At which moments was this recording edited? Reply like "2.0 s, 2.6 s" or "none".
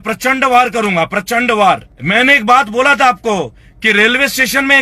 1.9 s